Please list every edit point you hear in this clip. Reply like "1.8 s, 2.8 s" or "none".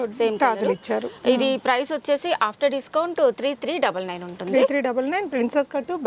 none